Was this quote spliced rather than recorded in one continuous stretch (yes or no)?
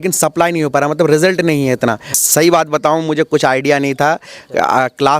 yes